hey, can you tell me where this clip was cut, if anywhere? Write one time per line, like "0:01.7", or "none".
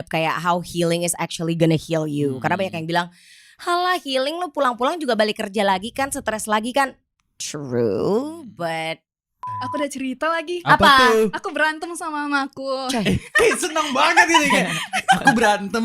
0:09.5